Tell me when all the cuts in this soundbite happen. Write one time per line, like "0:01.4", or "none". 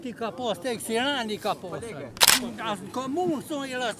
0:02.3

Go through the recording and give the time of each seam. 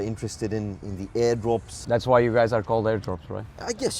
0:01.7

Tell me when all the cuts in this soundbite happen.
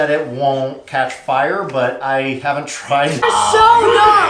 0:03.2

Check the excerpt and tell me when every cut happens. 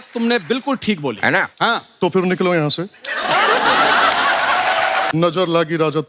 0:05.1

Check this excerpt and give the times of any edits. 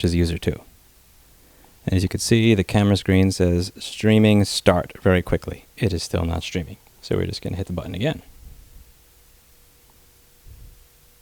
0:05.6

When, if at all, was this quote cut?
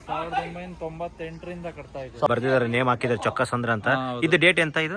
0:02.3

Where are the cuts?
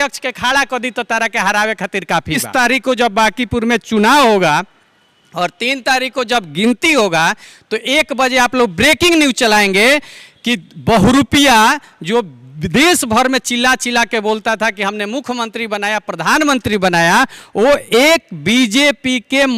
0:02.4

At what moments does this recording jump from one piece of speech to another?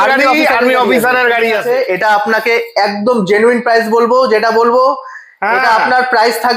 0:01.7

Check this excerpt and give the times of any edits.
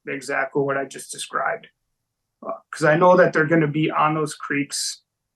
none

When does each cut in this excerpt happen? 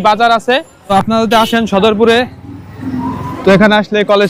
0:00.9

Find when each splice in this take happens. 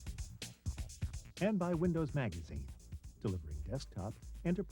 0:01.3

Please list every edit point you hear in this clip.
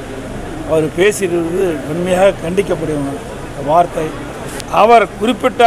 0:04.5

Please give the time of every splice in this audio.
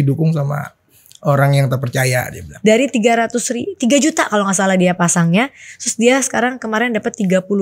0:02.4

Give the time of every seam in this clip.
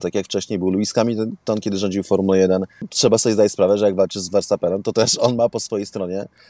0:02.9

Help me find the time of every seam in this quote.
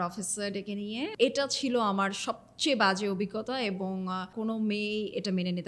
0:01.1
0:04.3

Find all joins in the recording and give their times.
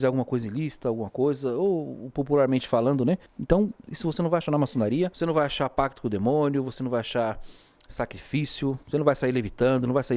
0:03.3
0:05.2
0:08.8

